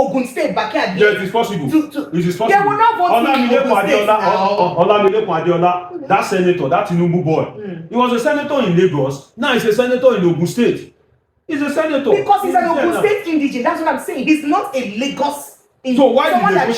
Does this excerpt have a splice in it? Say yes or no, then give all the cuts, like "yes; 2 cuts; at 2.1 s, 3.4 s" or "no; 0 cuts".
no; 0 cuts